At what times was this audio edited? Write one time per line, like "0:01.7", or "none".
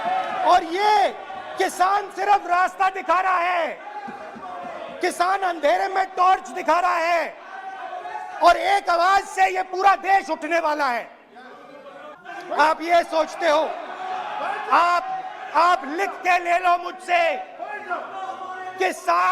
0:12.1